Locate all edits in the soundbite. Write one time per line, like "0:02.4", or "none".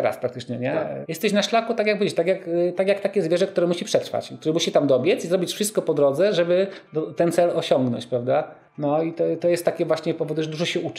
0:01.0
0:08.6